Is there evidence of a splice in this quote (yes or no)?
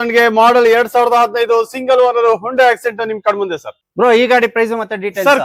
no